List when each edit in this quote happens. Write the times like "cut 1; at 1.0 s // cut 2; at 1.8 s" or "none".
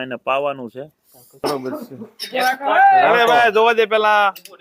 cut 1; at 1.4 s